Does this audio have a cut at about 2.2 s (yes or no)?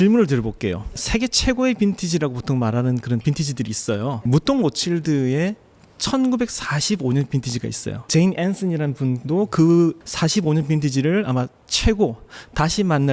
no